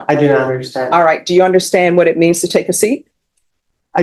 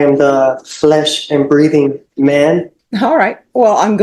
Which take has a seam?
second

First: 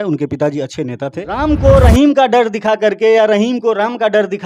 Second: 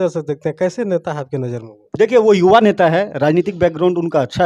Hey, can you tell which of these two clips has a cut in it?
first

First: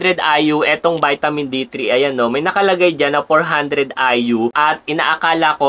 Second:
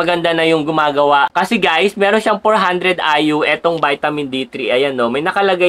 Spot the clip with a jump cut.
second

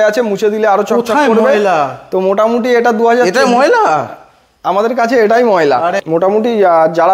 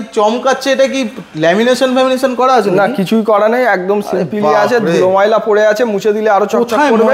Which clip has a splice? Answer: first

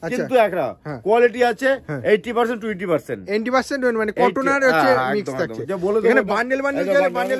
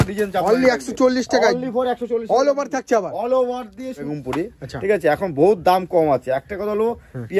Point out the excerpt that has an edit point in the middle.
second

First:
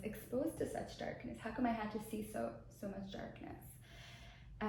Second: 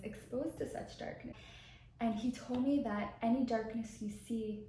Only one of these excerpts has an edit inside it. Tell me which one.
second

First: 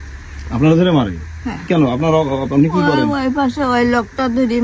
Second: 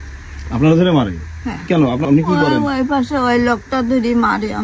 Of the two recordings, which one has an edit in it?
second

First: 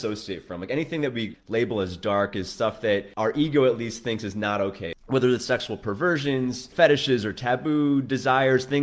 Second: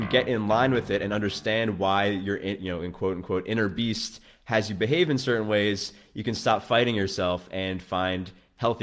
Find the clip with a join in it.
first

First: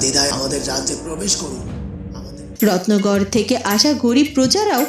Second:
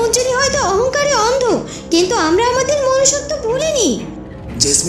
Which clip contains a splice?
first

